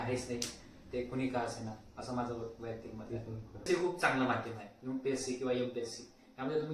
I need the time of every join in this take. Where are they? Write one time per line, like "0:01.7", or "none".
0:03.6